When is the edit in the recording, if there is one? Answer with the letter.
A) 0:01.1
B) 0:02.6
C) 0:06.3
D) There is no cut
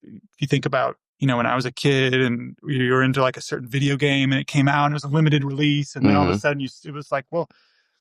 A